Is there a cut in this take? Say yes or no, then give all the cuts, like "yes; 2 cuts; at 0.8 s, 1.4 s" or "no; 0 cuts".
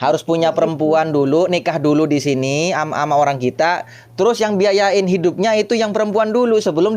no; 0 cuts